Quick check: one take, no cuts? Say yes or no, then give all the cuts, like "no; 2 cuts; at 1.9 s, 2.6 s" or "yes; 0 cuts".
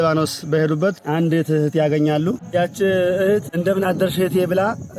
no; 3 cuts; at 1.0 s, 2.4 s, 3.5 s